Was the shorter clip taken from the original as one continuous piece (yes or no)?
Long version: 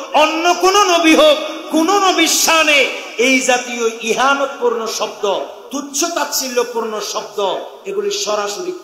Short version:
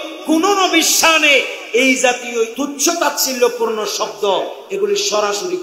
no